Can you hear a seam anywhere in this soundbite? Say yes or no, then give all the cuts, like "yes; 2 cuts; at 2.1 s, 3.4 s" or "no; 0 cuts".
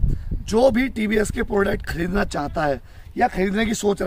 no; 0 cuts